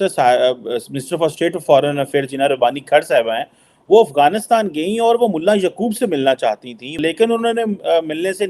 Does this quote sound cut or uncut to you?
cut